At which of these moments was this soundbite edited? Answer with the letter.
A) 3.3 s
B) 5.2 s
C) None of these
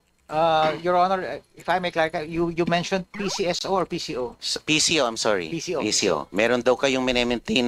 A